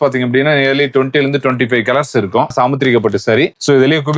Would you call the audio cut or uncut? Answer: cut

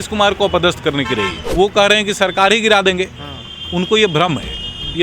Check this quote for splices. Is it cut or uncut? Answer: cut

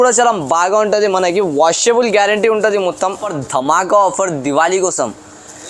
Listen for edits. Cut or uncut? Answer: cut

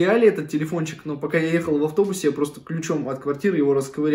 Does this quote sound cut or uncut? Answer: uncut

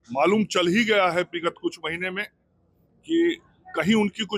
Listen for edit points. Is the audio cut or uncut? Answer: uncut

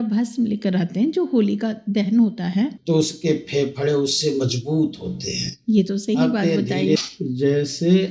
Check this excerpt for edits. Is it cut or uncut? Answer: cut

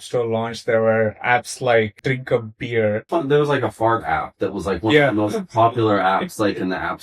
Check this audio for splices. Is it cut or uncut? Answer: cut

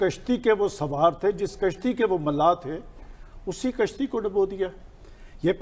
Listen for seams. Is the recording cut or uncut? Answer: uncut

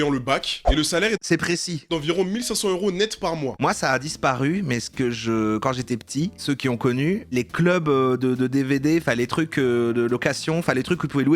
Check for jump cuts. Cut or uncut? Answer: cut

